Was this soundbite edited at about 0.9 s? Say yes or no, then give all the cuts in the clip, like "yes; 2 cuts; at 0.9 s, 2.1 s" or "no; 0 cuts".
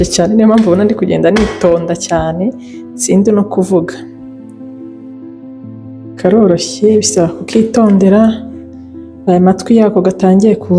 no; 2 cuts; at 3.9 s, 6.2 s